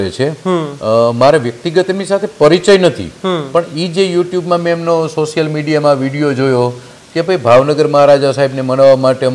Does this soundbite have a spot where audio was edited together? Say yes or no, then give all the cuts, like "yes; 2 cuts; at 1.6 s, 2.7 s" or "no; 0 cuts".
no; 0 cuts